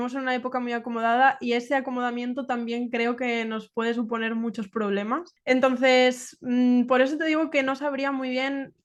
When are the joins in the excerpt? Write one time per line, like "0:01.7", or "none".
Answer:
none